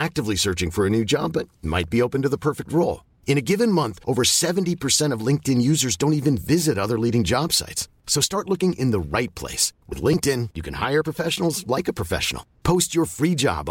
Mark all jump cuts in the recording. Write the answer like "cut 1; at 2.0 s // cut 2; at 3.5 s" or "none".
none